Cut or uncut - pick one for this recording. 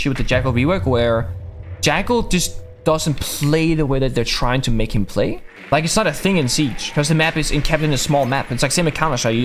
uncut